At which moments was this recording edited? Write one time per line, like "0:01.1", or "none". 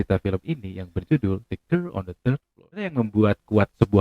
0:02.9